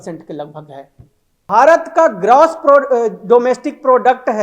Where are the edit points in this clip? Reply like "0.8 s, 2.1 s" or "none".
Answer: 1.4 s